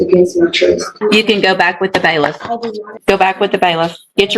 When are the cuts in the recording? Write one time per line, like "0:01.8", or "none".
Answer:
0:00.9
0:03.0